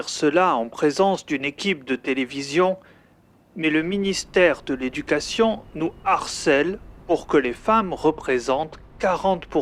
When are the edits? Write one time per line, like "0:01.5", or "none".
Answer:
none